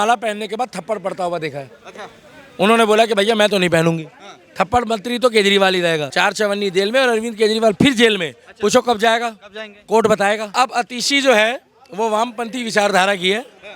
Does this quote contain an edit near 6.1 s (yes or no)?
yes